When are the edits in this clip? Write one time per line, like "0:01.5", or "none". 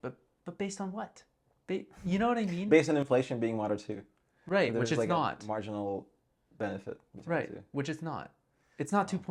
none

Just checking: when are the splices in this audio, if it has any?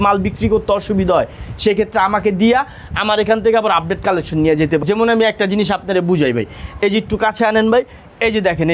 0:04.8

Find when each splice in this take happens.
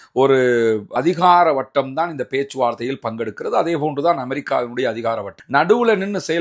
0:01.0

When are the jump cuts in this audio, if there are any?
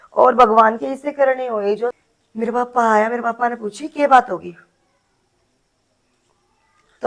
0:01.9

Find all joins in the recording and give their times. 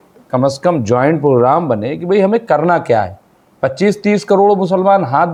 none

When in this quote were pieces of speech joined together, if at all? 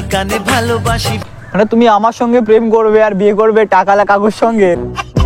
0:01.1

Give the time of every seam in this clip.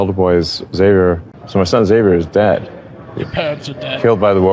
0:01.3

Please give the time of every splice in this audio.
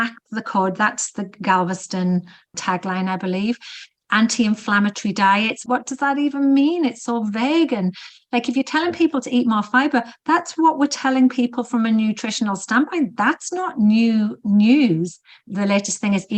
0:05.6
0:15.3

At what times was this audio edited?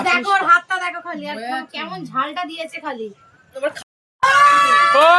0:03.8

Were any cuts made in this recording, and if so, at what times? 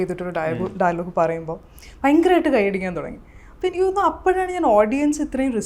none

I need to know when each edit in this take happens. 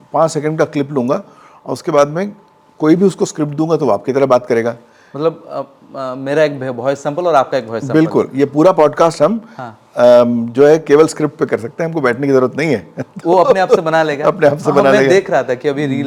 none

